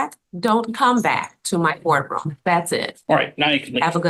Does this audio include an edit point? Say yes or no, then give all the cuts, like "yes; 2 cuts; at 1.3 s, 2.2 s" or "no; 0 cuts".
no; 0 cuts